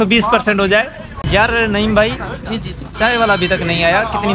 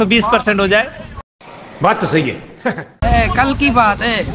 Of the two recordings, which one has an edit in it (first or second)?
first